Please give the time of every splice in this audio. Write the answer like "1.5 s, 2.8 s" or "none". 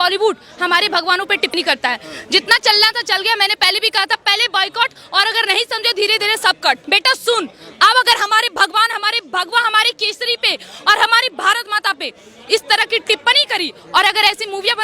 1.5 s, 6.8 s